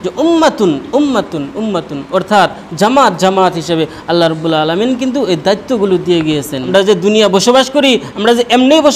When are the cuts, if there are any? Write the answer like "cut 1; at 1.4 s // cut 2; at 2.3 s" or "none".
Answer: cut 1; at 6.6 s